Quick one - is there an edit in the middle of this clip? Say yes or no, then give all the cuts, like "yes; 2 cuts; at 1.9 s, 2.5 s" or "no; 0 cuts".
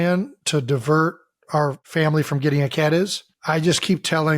yes; 2 cuts; at 1.8 s, 3.3 s